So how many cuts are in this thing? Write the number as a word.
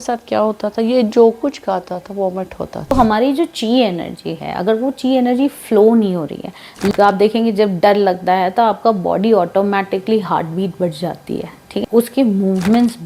three